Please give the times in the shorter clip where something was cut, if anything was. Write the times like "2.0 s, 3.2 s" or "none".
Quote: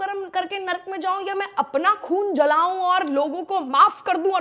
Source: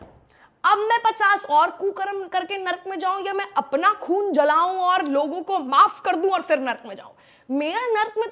none